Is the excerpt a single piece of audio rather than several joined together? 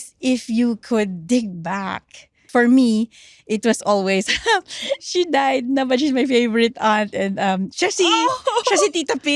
no; 1 cut; at 2.4 s

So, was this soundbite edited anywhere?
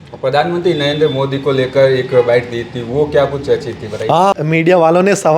yes; 1 cut; at 4.3 s

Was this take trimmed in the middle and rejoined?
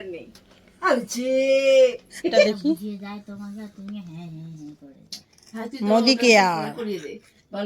yes; 1 cut; at 2.5 s

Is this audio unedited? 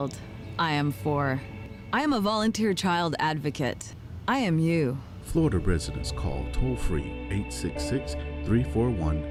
yes; 0 cuts

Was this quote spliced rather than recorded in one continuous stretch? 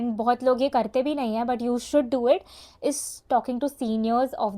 no; 0 cuts

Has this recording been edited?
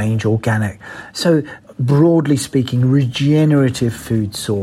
no; 0 cuts

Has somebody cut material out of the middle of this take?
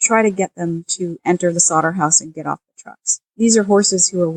yes; 1 cut; at 3.3 s

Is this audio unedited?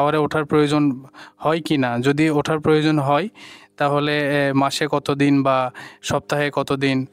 yes; 0 cuts

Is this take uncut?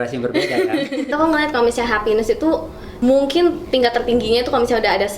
no; 2 cuts; at 1.1 s, 2.8 s

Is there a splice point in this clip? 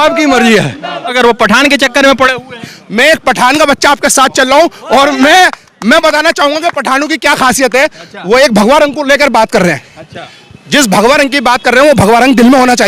yes; 1 cut; at 1.1 s

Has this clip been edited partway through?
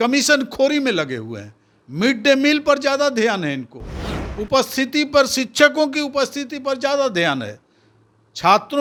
no; 0 cuts

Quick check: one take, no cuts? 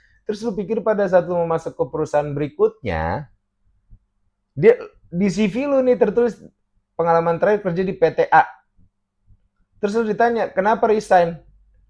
yes; 0 cuts

